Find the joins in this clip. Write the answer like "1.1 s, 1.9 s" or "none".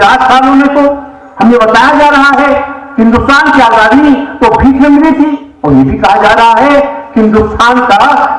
5.5 s